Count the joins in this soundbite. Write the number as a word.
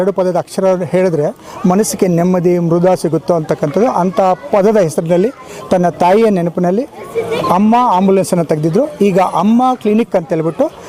zero